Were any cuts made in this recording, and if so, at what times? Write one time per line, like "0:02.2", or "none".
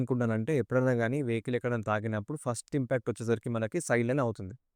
none